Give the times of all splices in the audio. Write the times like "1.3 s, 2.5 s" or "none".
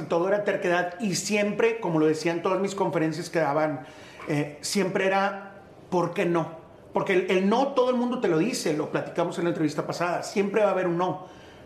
none